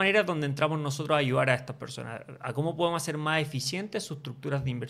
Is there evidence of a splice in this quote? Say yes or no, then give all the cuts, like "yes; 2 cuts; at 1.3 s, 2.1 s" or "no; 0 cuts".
no; 0 cuts